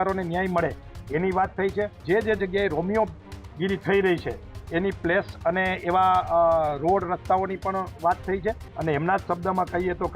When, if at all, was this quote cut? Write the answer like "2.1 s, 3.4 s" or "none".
2.0 s, 8.7 s